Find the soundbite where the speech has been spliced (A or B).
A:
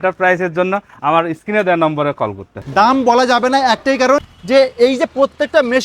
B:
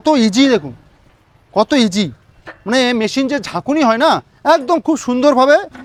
A